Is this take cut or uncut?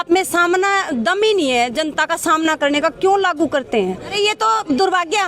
cut